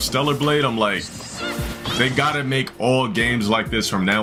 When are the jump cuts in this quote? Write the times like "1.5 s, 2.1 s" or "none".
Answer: none